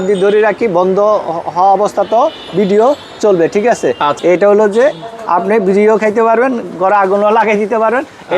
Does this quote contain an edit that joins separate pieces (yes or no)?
yes